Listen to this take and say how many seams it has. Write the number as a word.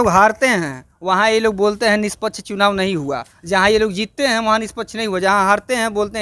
zero